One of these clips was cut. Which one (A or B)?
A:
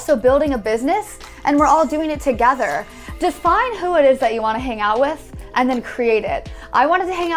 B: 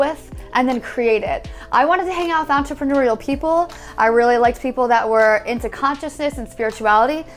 A